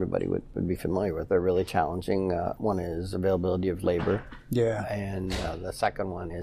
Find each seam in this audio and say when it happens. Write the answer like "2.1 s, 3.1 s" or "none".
1.2 s, 2.6 s